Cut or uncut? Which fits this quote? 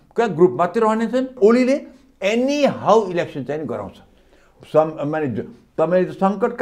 cut